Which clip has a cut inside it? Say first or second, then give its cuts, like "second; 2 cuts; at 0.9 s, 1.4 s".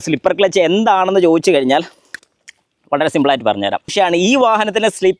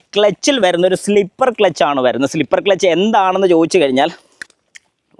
first; 1 cut; at 3.9 s